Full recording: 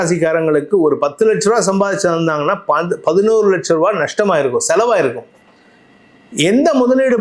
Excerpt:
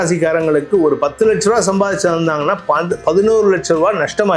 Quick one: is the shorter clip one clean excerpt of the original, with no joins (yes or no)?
yes